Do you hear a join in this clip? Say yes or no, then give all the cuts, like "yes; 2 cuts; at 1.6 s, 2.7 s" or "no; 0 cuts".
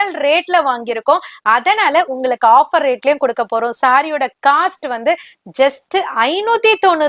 no; 0 cuts